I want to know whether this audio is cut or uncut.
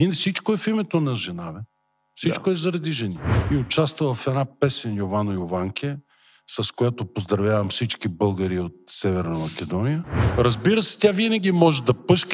cut